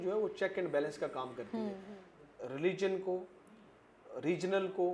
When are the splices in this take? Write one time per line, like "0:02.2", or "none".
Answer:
0:01.8